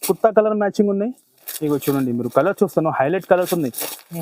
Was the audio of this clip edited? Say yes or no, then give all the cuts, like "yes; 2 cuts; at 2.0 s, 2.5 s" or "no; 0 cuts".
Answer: no; 0 cuts